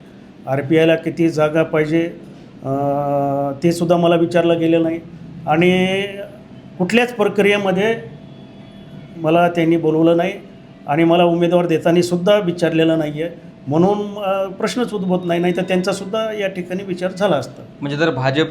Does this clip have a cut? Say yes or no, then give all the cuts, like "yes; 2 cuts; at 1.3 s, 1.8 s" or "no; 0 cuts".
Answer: no; 0 cuts